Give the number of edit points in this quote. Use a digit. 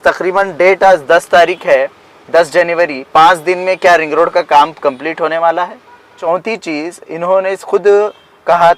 1